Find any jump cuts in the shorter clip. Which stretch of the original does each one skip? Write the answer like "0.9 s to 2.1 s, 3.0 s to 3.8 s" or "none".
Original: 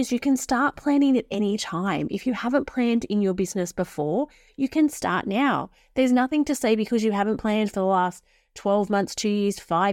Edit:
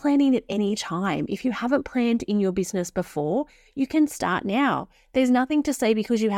none